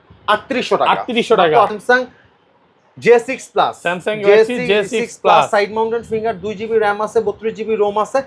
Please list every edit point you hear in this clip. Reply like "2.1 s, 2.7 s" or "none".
1.8 s